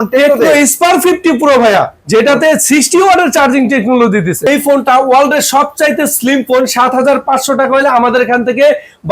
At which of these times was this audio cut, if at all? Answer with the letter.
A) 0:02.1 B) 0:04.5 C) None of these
B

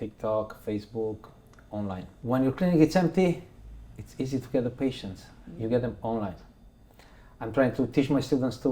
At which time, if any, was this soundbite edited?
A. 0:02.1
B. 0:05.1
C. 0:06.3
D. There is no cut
A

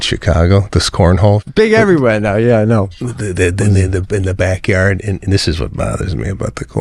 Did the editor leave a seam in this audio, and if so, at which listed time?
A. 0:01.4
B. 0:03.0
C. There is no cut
A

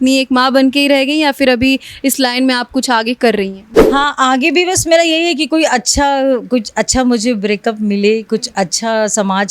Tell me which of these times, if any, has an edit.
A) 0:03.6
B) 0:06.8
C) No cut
A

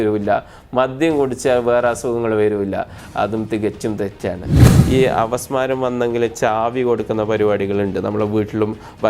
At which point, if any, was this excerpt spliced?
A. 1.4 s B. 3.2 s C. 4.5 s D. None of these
C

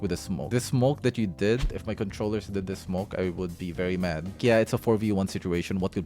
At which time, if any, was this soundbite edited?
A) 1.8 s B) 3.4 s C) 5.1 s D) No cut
A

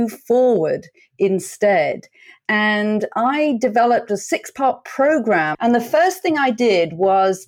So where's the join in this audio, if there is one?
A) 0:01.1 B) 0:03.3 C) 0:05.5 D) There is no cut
C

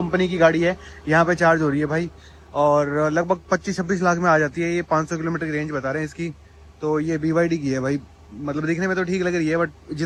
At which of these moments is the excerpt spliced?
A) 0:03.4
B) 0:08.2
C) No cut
C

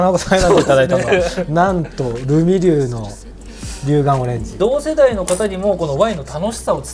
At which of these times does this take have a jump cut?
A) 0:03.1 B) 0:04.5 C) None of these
B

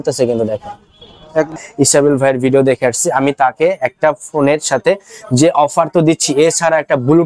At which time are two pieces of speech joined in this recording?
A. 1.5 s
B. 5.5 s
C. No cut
A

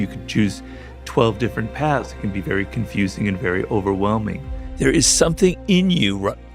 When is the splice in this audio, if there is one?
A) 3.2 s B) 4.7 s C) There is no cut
B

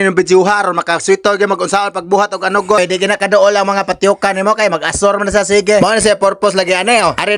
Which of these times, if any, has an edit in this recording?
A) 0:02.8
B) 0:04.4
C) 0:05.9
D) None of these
A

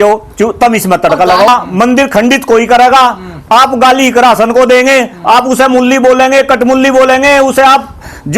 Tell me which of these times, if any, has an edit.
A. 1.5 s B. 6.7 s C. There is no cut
A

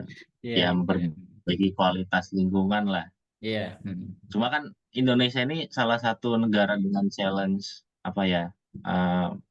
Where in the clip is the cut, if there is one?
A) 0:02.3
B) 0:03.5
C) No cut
C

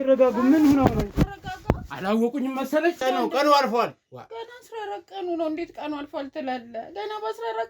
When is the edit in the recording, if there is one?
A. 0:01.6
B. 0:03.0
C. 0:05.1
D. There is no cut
B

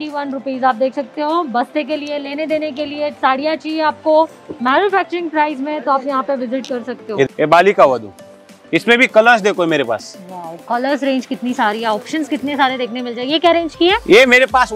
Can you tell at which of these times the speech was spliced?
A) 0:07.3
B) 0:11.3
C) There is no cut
A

